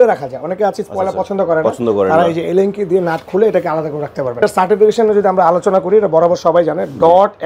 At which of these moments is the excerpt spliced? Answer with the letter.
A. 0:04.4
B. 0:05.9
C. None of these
A